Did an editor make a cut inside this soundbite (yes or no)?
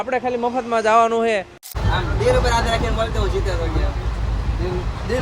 yes